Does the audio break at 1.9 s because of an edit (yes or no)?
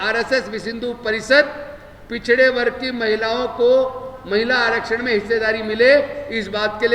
no